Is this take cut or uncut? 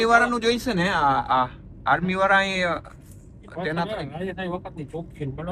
uncut